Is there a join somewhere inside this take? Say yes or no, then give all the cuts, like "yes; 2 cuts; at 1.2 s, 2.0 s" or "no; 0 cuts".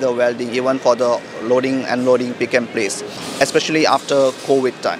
yes; 1 cut; at 3.2 s